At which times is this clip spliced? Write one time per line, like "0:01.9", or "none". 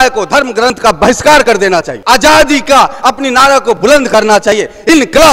0:01.9